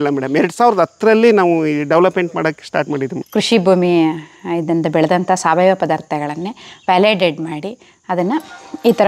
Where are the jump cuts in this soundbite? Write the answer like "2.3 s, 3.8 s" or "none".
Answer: 3.2 s